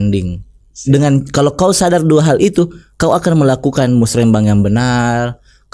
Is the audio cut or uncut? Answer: uncut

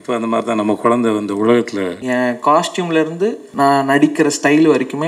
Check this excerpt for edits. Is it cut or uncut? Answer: cut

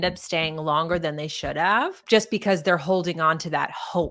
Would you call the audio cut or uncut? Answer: cut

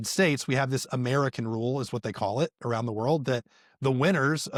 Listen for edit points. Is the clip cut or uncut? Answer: uncut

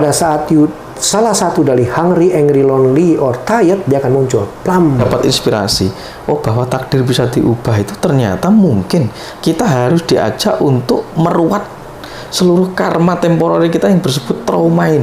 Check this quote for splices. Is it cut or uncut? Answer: cut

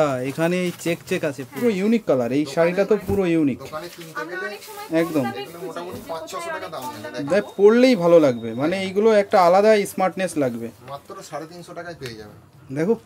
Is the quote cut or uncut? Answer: cut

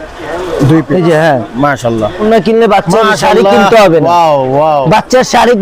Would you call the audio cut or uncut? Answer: cut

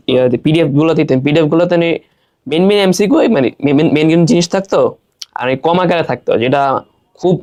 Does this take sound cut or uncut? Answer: uncut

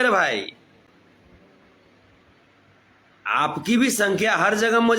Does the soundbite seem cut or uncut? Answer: uncut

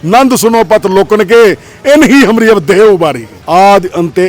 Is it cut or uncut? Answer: cut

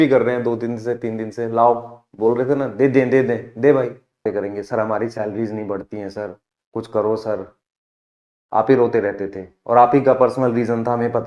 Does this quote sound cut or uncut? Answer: cut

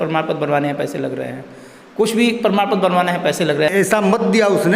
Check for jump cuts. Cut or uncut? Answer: cut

